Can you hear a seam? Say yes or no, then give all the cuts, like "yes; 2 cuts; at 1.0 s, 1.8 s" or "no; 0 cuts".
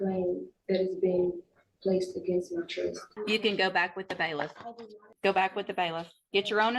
yes; 2 cuts; at 3.1 s, 5.1 s